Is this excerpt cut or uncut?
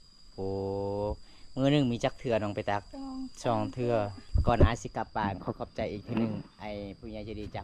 cut